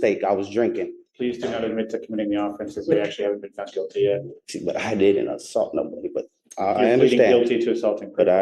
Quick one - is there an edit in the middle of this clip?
yes; 2 cuts; at 1.0 s, 4.4 s

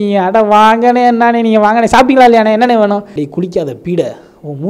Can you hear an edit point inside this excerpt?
yes; 1 cut; at 3.2 s

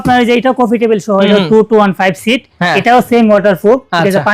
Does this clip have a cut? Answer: no; 0 cuts

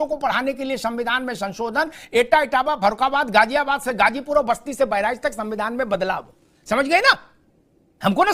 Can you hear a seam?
no; 0 cuts

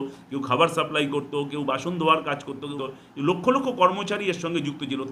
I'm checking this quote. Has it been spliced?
yes; 1 cut; at 2.7 s

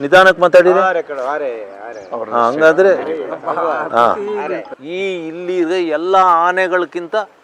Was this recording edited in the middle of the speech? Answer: yes; 1 cut; at 4.7 s

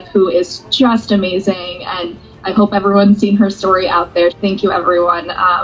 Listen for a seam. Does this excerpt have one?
yes; 1 cut; at 4.3 s

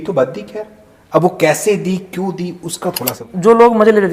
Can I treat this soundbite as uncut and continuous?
no; 1 cut; at 3.2 s

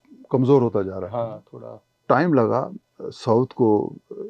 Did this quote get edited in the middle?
yes; 1 cut; at 2.0 s

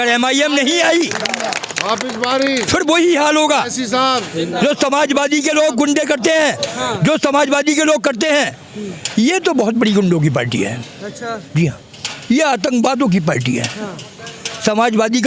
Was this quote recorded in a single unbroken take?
yes; 0 cuts

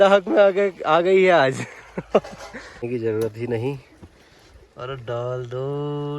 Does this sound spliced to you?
yes; 1 cut; at 2.9 s

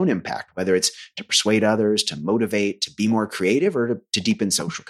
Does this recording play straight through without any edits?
yes; 0 cuts

